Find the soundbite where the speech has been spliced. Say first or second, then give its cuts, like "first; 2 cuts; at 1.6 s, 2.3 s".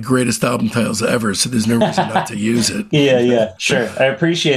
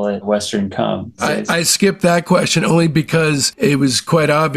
second; 2 cuts; at 1.3 s, 3.5 s